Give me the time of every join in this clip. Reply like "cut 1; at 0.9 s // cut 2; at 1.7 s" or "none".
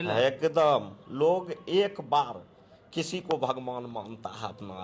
cut 1; at 1.0 s

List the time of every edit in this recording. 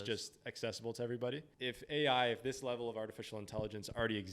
cut 1; at 1.5 s

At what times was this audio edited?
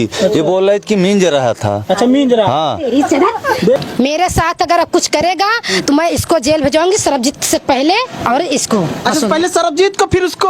cut 1; at 3.8 s

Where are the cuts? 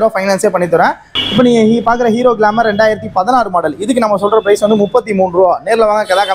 cut 1; at 1.1 s

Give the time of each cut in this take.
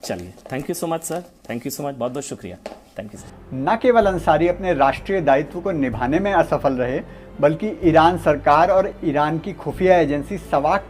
cut 1; at 3.3 s

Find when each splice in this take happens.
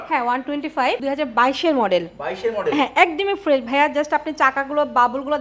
cut 1; at 1.0 s

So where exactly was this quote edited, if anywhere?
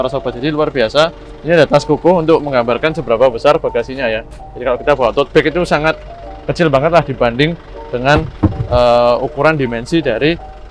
none

